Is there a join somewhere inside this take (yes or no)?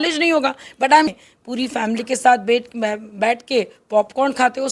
yes